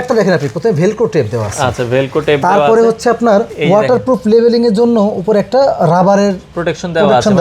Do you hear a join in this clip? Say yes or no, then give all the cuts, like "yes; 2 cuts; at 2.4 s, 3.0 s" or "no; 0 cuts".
yes; 1 cut; at 3.5 s